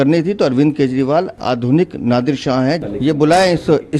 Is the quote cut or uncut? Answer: cut